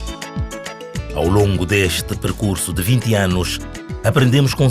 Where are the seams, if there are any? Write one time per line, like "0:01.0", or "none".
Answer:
0:00.9